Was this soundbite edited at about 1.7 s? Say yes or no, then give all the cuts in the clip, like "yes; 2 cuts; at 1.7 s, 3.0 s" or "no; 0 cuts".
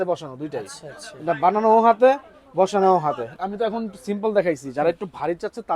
no; 1 cut; at 3.3 s